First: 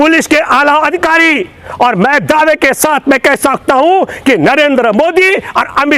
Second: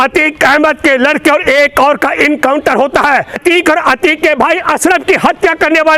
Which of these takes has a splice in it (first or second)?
second